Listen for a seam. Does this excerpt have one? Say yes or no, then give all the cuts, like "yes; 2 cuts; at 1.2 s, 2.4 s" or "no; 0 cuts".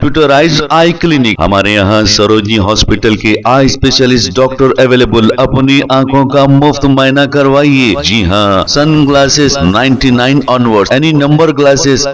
no; 0 cuts